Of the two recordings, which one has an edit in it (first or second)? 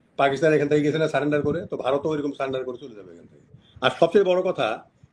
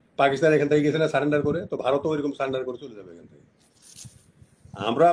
first